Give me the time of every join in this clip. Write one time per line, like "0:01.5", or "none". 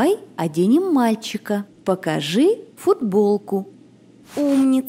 0:04.0